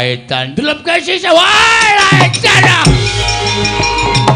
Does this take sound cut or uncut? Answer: cut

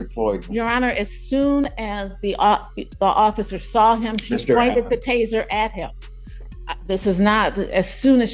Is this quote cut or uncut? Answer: uncut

